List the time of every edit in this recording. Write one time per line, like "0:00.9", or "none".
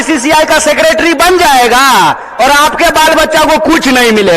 none